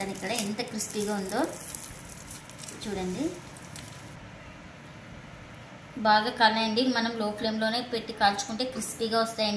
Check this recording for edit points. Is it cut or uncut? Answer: cut